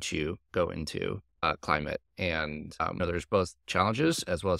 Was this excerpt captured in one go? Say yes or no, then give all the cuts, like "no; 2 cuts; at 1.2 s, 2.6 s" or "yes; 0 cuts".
no; 1 cut; at 3.0 s